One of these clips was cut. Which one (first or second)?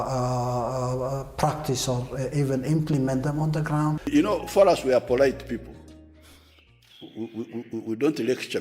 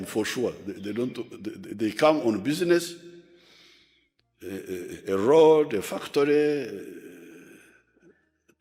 first